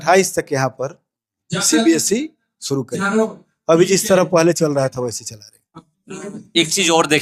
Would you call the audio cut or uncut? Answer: uncut